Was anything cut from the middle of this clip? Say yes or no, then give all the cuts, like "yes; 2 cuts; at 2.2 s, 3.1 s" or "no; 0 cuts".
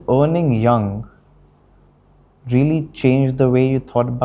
no; 0 cuts